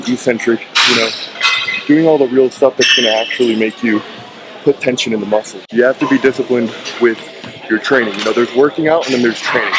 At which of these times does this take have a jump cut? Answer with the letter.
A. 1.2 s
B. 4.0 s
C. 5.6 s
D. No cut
C